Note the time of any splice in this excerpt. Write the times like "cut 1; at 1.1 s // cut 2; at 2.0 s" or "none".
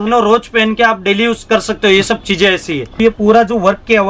cut 1; at 3.0 s